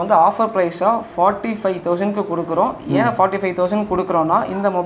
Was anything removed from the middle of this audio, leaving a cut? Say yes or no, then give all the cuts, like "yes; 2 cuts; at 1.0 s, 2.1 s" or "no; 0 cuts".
no; 0 cuts